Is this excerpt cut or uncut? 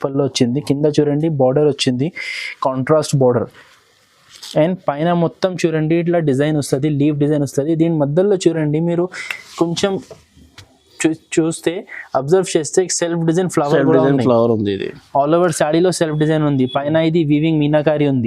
uncut